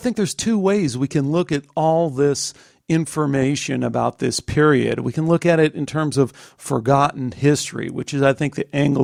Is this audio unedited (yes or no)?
yes